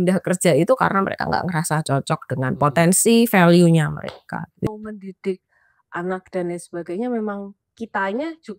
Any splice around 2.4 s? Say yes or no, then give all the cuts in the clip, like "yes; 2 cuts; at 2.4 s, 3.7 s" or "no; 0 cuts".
no; 1 cut; at 4.6 s